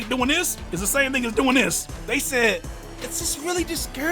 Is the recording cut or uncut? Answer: cut